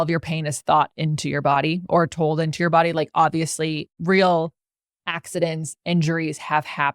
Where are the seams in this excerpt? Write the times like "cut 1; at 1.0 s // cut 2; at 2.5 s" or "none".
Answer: cut 1; at 4.0 s